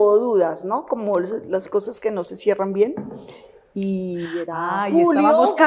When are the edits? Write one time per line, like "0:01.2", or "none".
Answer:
none